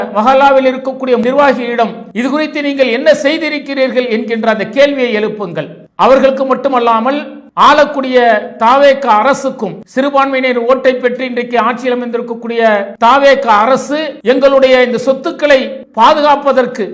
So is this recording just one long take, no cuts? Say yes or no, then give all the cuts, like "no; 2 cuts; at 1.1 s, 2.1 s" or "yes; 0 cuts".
no; 2 cuts; at 1.2 s, 2.0 s